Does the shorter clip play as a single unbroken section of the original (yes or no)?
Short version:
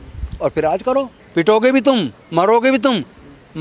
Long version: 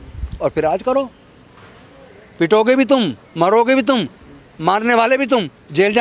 no